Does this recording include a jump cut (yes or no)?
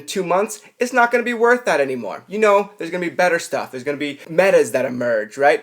yes